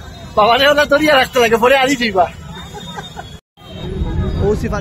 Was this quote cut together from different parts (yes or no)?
no